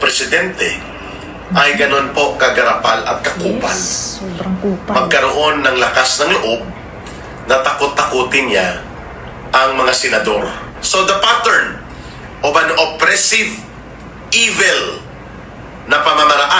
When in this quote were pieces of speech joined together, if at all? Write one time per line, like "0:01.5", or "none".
0:10.9